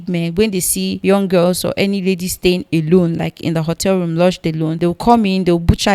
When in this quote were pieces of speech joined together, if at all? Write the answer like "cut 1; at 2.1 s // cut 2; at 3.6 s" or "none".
cut 1; at 1.0 s // cut 2; at 4.7 s